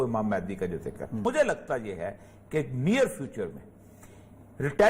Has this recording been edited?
yes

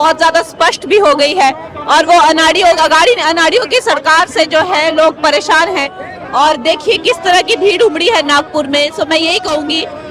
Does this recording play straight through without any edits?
yes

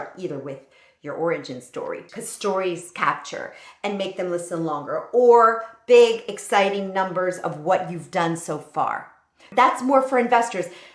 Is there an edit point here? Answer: yes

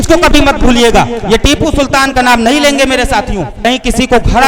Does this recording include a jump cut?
yes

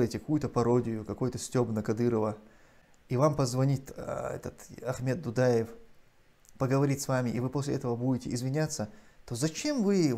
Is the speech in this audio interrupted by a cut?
no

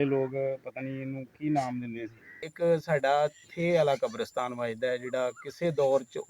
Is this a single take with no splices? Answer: no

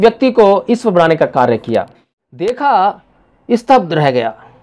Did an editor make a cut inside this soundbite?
yes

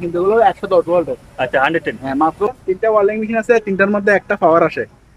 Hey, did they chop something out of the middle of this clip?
yes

